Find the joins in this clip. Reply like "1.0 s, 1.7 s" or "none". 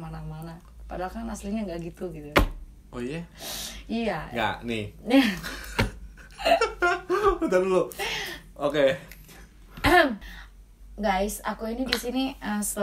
10.2 s